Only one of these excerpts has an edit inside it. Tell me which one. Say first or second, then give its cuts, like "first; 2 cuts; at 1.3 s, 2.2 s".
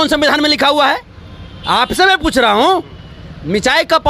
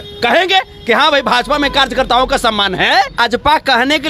second; 1 cut; at 3.2 s